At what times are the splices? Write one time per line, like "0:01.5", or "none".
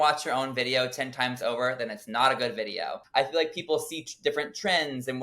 0:03.0